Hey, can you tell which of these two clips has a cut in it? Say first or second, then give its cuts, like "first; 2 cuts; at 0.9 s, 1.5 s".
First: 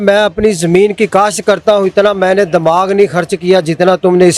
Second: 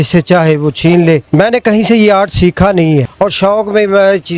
second; 2 cuts; at 1.2 s, 3.1 s